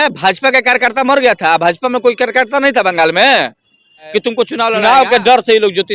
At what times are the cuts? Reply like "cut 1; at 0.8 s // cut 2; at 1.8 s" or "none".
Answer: cut 1; at 4.7 s

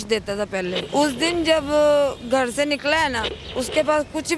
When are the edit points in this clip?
cut 1; at 0.8 s // cut 2; at 3.4 s

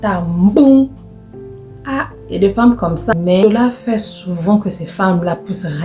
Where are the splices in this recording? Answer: cut 1; at 3.1 s

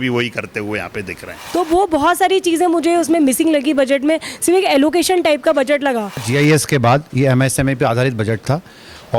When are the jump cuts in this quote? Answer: cut 1; at 1.3 s // cut 2; at 6.3 s

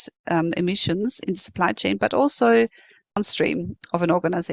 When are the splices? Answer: cut 1; at 3.2 s

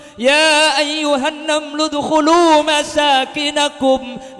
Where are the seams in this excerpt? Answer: none

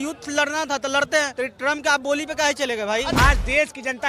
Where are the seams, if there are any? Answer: cut 1; at 1.3 s // cut 2; at 3.1 s

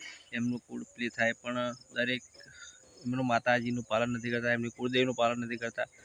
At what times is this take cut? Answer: none

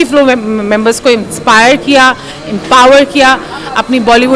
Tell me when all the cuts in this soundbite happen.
none

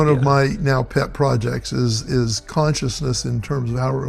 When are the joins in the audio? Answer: none

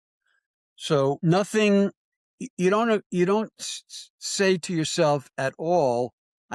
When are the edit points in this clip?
cut 1; at 1.2 s

